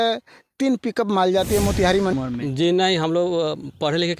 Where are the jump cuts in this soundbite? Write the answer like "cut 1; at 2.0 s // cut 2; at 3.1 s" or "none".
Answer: cut 1; at 2.1 s